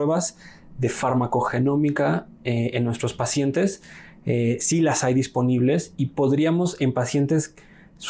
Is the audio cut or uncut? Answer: uncut